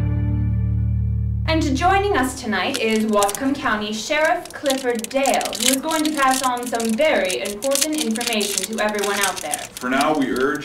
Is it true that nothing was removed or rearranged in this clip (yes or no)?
no